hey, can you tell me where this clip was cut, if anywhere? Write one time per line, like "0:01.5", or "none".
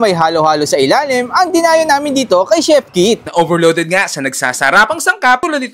none